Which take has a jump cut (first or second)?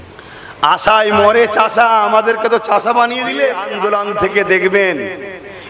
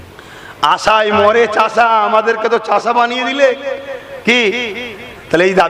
first